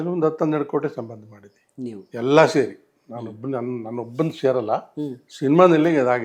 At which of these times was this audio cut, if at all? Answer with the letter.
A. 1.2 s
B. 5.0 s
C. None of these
C